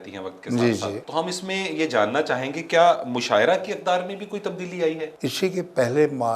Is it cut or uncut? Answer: cut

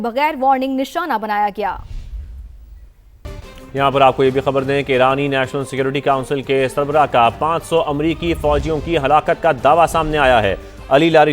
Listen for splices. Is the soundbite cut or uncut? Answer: cut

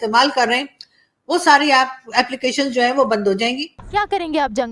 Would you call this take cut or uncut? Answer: cut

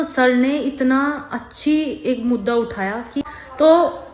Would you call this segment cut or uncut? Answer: cut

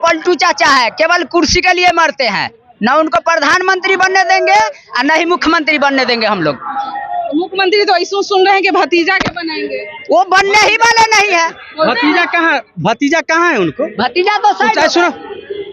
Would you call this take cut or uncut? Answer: uncut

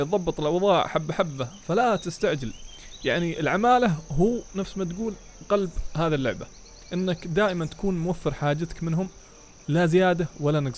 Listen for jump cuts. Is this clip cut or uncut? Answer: uncut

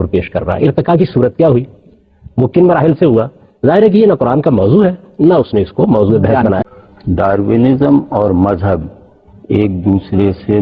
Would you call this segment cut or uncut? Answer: cut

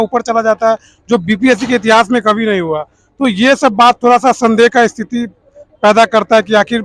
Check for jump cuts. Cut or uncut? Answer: uncut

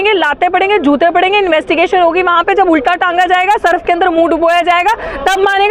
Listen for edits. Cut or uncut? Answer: uncut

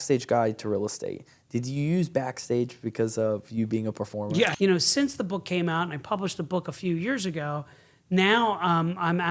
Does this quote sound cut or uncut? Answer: cut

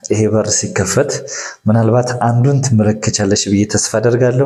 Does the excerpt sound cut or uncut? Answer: uncut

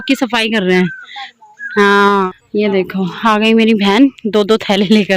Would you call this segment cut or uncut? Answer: cut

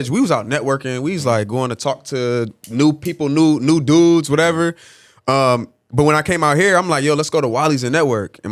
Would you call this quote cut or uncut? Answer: uncut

